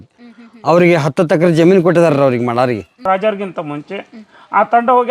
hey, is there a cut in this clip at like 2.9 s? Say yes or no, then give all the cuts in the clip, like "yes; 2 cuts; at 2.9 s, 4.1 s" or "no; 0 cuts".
yes; 1 cut; at 2.9 s